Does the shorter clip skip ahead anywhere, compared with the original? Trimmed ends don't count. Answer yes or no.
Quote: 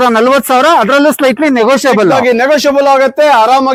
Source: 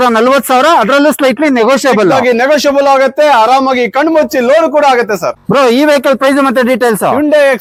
no